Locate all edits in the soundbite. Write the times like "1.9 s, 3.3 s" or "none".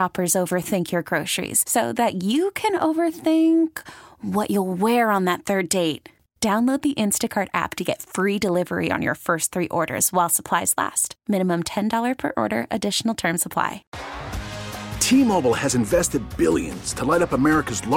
13.9 s